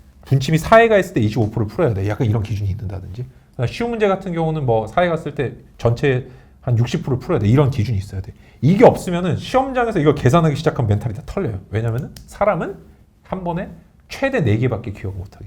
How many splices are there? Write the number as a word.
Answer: zero